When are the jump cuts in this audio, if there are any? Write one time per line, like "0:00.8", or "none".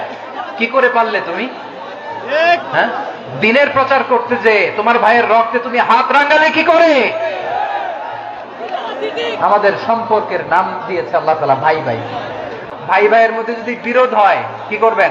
0:12.6